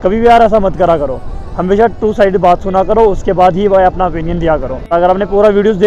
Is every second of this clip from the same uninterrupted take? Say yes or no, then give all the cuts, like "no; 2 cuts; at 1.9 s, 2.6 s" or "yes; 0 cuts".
no; 1 cut; at 4.9 s